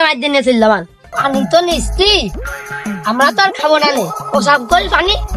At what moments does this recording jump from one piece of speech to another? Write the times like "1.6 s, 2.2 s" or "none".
1.1 s